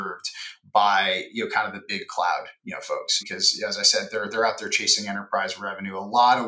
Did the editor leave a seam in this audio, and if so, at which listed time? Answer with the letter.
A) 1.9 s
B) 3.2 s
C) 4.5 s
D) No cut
B